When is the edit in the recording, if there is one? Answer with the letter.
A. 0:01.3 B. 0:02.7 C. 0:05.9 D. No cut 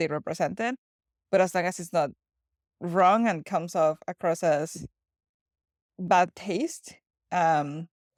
D